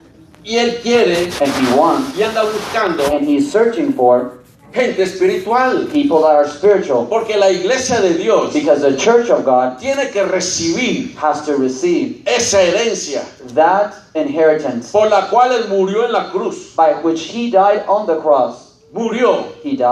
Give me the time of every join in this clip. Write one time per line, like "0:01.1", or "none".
0:02.6